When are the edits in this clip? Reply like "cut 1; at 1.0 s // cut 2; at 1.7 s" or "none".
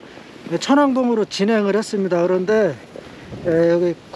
none